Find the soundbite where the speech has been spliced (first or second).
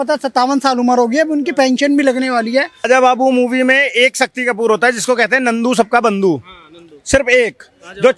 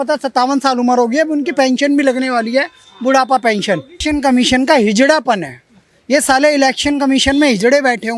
first